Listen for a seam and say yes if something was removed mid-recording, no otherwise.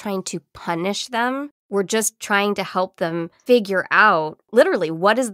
yes